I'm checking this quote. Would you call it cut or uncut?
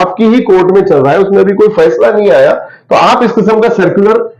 uncut